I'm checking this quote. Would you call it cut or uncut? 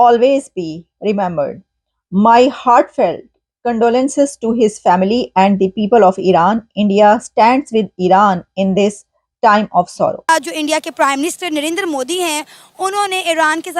cut